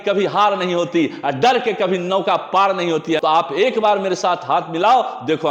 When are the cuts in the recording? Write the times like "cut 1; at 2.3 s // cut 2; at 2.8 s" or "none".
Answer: cut 1; at 3.2 s